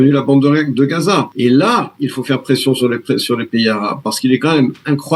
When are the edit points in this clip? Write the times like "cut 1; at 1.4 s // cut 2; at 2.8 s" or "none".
cut 1; at 1.3 s